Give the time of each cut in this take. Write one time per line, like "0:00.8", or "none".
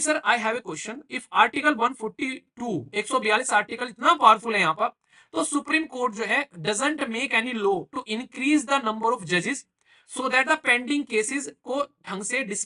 none